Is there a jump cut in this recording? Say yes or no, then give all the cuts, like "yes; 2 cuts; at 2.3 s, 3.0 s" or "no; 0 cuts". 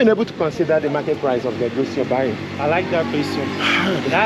no; 0 cuts